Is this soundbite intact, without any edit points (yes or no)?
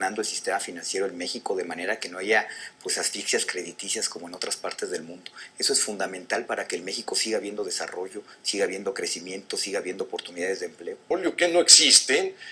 yes